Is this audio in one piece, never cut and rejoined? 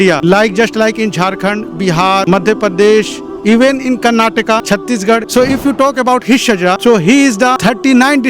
no; 1 cut; at 5.3 s

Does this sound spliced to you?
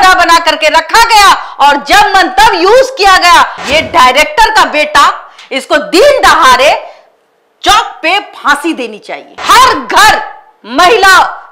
yes; 2 cuts; at 3.6 s, 9.3 s

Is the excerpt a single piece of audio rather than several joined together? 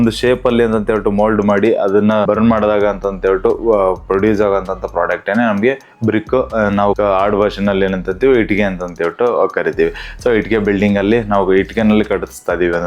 yes; 0 cuts

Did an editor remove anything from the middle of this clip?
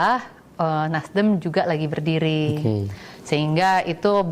no; 0 cuts

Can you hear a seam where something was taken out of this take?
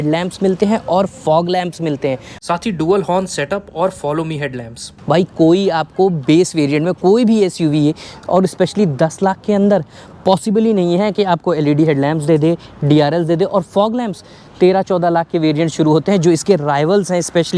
no; 0 cuts

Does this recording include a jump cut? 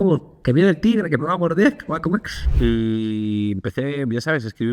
yes; 1 cut; at 2.4 s

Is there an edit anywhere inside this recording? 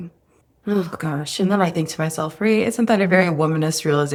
no; 0 cuts

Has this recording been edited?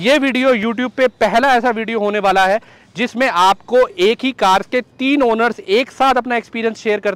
no; 0 cuts

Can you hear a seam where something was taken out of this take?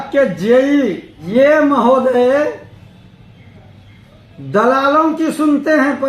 yes; 1 cut; at 1.1 s

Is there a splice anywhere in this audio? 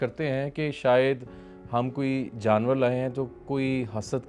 no; 0 cuts

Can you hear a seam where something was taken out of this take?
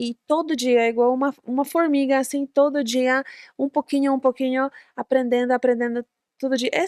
no; 0 cuts

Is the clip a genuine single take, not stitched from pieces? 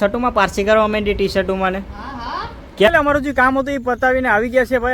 no; 1 cut; at 2.9 s

